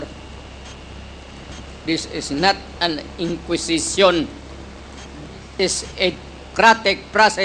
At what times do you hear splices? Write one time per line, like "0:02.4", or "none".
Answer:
none